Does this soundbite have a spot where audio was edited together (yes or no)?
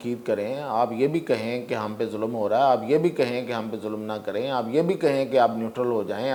no